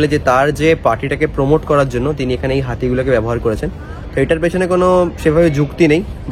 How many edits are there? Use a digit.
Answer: 0